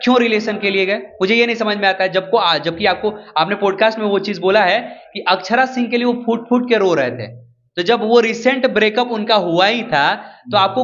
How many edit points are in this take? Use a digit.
0